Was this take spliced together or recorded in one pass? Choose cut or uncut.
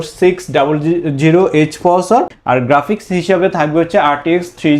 cut